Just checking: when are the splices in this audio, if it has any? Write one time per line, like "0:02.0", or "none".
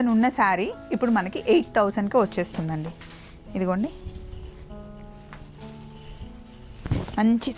none